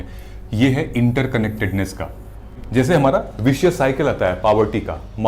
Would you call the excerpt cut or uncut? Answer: cut